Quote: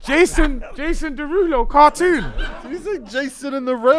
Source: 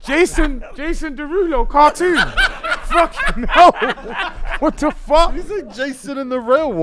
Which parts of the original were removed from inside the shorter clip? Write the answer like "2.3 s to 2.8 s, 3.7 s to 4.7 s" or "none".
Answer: 2.8 s to 5.4 s